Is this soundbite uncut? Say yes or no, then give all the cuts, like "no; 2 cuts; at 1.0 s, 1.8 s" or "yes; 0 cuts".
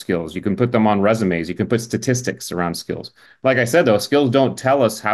yes; 0 cuts